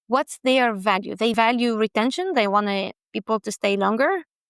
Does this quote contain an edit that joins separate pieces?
yes; 1 cut; at 1.3 s

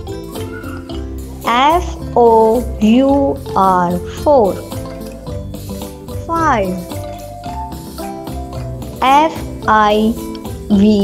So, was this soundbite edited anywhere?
yes; 3 cuts; at 1.0 s, 7.4 s, 8.9 s

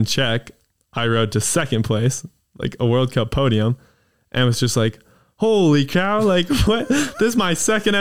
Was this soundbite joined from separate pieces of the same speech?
no; 0 cuts

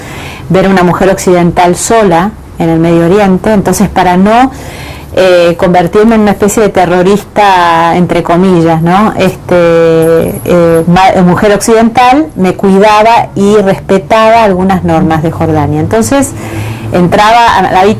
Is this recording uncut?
yes; 0 cuts

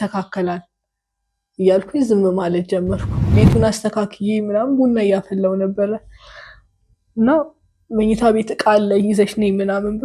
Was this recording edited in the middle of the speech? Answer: yes; 1 cut; at 3.3 s

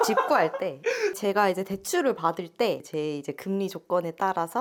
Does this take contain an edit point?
no; 0 cuts

